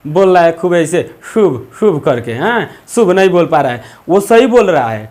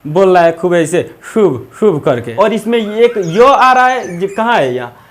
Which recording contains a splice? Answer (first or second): second